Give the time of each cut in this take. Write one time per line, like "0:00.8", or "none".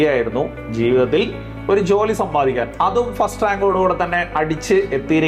none